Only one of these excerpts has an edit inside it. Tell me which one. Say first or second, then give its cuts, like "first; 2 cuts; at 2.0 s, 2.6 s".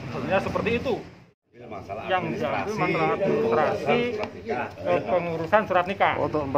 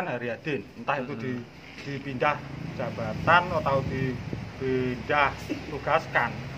first; 1 cut; at 1.4 s